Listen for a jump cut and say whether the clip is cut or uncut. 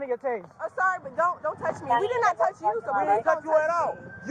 uncut